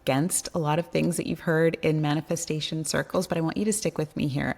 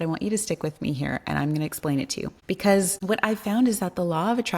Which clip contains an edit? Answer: second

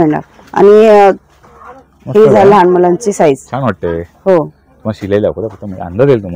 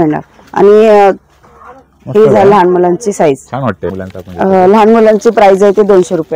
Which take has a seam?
second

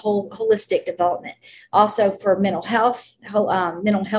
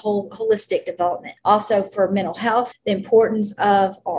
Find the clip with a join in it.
second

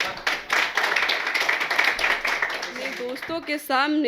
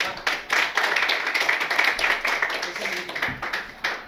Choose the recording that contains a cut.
first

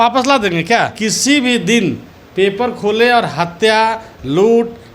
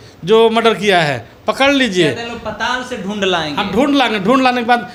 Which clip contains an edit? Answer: first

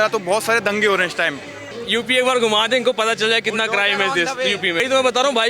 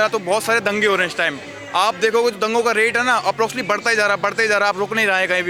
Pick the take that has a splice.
first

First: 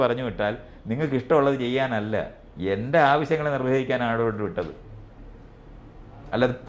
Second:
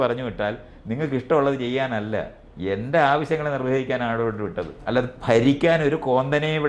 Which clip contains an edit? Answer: second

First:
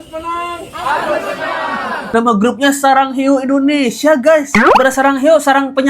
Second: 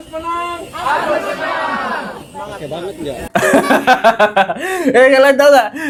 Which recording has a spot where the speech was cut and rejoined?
first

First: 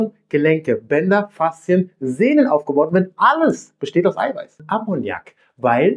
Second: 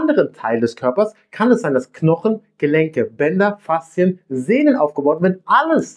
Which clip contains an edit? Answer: first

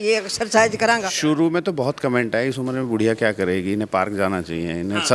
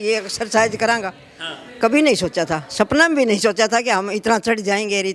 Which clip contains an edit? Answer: first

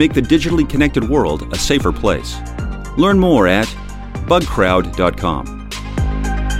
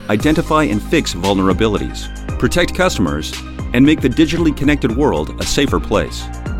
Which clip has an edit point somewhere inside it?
first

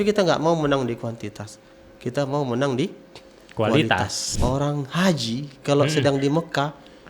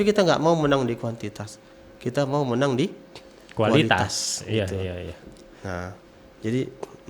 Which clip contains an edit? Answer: first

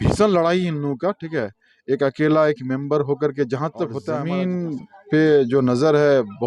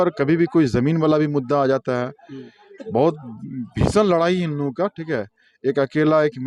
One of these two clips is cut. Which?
first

